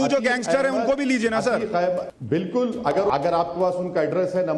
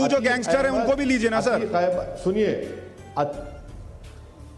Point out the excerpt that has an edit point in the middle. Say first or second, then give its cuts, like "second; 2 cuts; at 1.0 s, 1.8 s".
first; 2 cuts; at 2.1 s, 3.1 s